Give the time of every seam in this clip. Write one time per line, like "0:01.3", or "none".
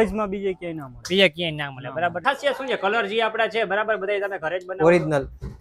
0:02.2